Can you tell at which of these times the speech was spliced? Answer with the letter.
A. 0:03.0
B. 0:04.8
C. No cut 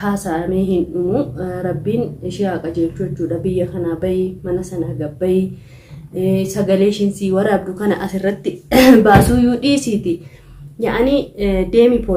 C